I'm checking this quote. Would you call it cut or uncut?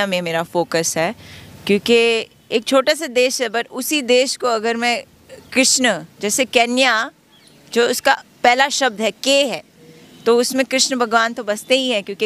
uncut